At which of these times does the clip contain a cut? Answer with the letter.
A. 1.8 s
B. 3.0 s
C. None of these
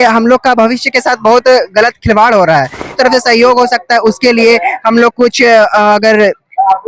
B